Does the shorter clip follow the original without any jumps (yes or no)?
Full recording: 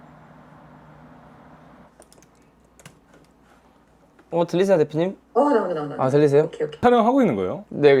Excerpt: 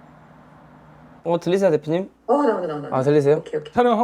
no